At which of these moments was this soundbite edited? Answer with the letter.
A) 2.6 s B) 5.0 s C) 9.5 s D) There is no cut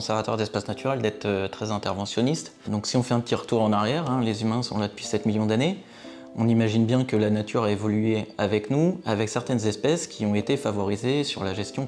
A